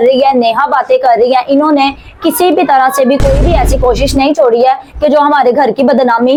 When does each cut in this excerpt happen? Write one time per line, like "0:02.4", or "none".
none